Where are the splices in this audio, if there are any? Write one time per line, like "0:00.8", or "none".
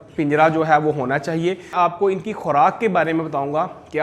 0:01.7

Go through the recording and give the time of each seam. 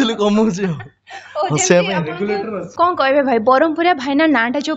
0:02.6

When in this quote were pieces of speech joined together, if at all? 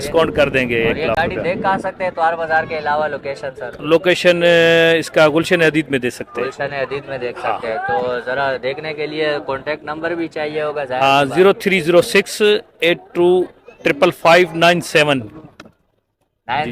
none

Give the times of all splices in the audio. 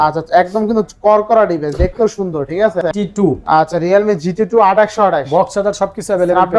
0:02.8

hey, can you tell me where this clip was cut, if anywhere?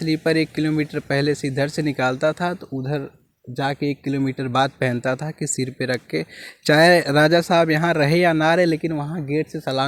none

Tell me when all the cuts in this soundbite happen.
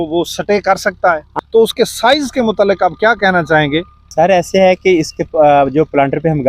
0:01.3
0:04.0

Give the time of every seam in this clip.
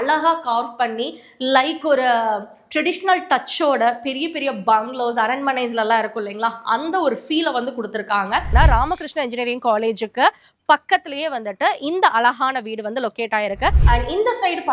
0:08.5
0:13.8

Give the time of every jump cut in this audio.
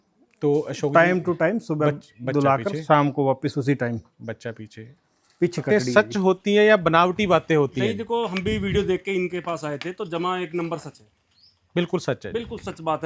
0:05.6

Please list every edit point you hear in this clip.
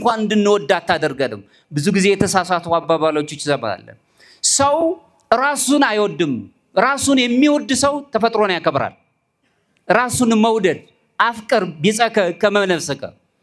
none

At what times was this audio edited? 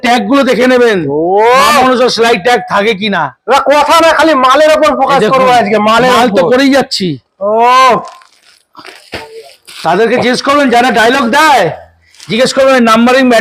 none

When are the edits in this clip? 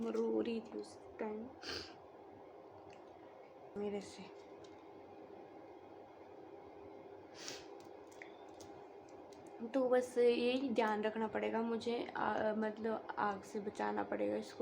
0:03.6

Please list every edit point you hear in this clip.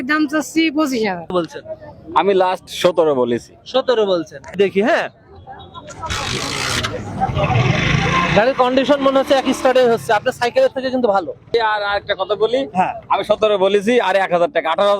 0:01.3
0:04.5
0:11.4

